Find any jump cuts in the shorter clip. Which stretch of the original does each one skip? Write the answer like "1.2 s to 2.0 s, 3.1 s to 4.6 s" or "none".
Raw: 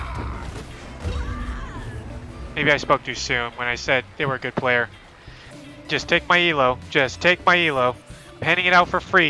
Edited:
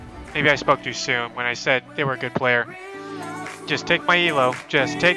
none